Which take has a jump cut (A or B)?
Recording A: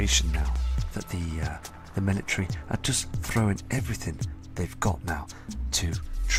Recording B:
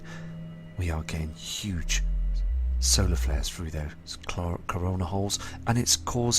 B